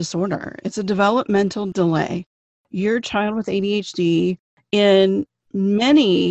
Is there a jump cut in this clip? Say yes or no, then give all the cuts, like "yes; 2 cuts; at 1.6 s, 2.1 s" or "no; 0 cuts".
yes; 1 cut; at 1.7 s